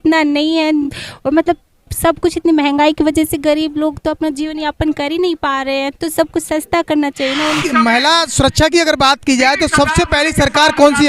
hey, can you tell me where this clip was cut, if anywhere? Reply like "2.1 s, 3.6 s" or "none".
7.6 s